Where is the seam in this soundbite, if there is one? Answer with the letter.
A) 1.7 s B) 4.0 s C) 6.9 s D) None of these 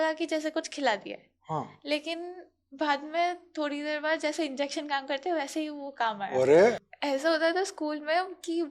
C